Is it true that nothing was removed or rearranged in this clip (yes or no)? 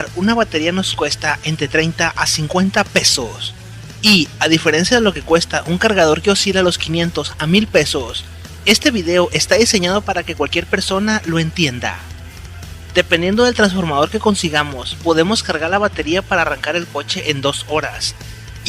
no